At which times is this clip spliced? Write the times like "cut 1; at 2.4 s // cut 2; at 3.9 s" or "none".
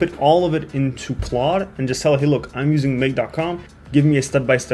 cut 1; at 3.7 s